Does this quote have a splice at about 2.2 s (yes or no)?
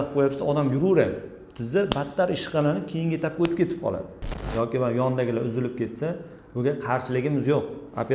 no